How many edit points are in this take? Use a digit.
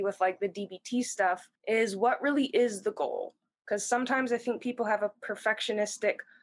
1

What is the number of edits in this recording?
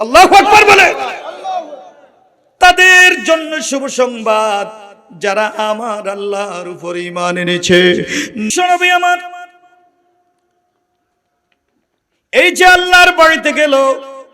1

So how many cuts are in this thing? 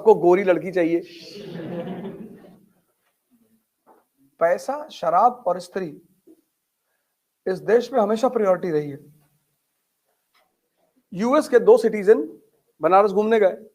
2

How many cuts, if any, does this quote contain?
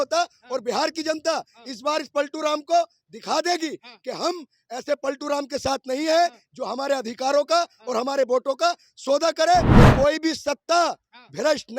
1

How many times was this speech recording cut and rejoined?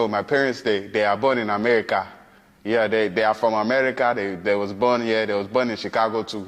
0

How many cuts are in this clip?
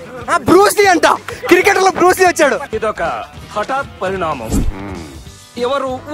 0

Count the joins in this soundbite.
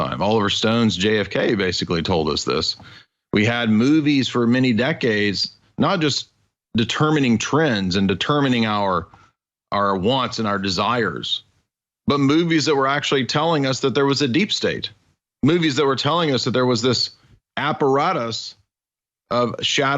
0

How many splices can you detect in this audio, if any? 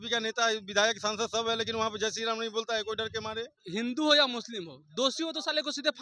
1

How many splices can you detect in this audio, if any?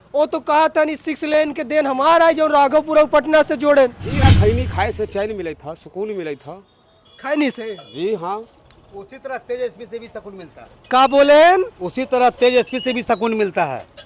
1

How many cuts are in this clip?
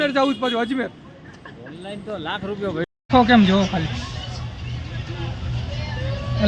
1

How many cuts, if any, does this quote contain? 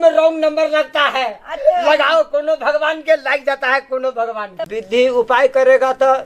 1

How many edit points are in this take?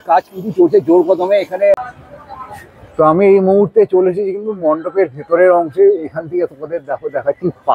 1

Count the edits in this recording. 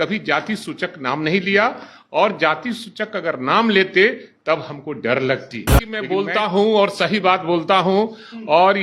1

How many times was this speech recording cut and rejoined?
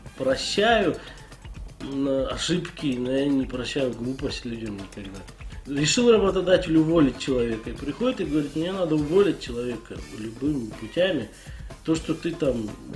1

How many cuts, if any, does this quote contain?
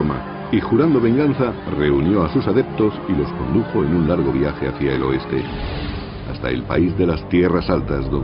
1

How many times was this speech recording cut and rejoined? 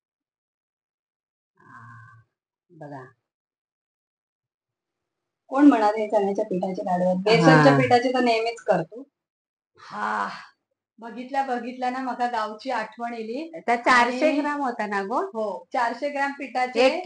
0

